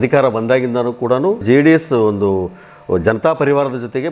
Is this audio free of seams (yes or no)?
no